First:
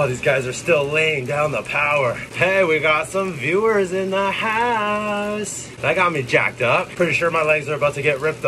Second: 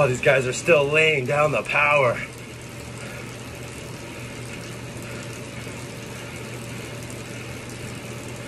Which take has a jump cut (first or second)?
first